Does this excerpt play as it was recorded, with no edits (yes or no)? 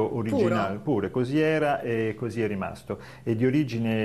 yes